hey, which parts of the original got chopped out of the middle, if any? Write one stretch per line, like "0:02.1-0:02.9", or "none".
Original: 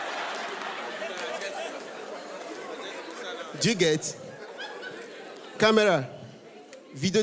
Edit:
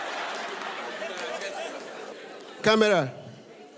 0:02.1-0:05.1